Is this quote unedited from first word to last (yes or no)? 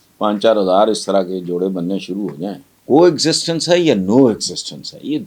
no